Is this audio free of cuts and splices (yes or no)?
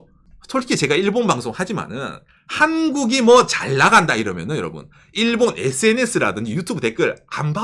yes